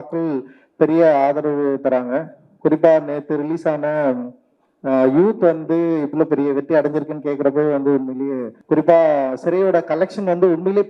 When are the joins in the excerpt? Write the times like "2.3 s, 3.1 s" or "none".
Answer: 6.1 s, 8.5 s